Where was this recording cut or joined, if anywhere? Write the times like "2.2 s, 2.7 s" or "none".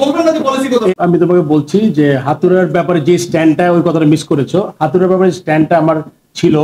0.9 s